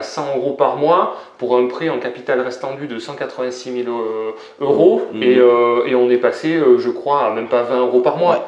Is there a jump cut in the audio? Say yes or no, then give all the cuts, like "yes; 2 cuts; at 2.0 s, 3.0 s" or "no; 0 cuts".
no; 0 cuts